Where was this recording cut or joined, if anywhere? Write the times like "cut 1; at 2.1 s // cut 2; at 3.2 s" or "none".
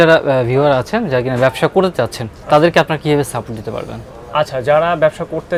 none